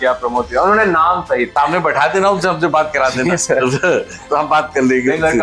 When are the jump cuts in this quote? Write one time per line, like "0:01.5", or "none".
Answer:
0:01.5